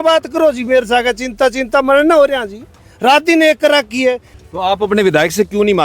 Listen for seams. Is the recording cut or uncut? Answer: cut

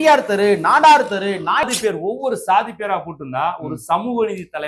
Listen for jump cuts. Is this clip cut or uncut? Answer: cut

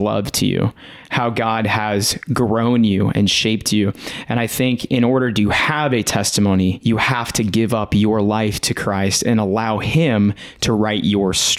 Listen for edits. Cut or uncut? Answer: uncut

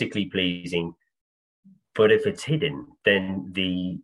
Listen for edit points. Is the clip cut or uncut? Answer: uncut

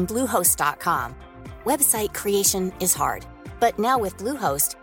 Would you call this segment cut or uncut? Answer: uncut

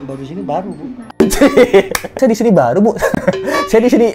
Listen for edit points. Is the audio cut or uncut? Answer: cut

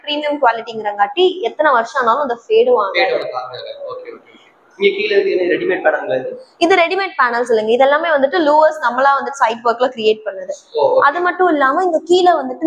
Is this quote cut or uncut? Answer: uncut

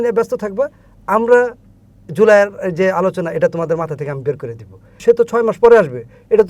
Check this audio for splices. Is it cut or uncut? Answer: cut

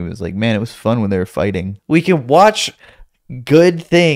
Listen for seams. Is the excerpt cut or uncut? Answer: cut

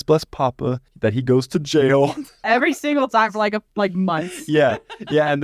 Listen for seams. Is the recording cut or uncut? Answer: cut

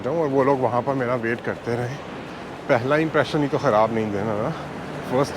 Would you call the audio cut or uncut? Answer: cut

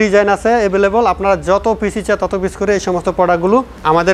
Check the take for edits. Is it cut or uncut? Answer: uncut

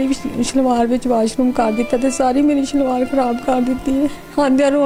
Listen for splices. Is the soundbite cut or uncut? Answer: uncut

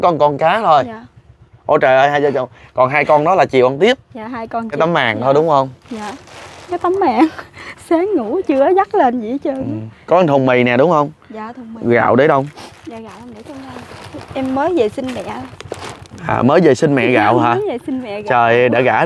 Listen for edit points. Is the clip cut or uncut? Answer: cut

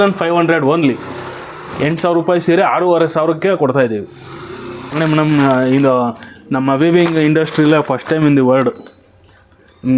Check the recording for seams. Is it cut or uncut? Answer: cut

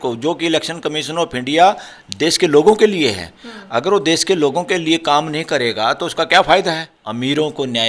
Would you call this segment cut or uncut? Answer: cut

